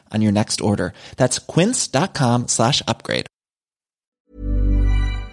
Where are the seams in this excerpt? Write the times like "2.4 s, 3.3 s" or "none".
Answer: 4.1 s